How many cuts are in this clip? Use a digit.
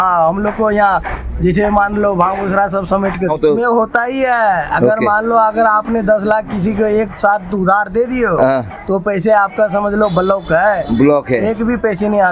1